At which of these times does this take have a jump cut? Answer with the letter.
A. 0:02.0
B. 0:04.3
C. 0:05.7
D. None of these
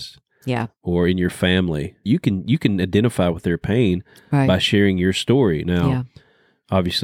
A